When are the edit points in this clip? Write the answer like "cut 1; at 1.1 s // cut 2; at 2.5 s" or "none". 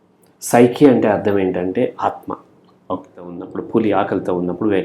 cut 1; at 3.5 s